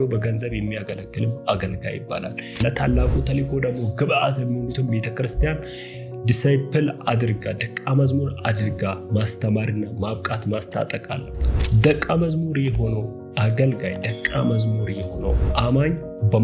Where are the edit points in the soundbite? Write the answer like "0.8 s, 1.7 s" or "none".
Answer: 2.6 s